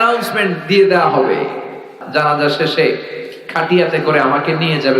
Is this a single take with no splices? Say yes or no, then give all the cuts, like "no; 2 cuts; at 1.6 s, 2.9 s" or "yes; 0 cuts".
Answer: no; 1 cut; at 1.9 s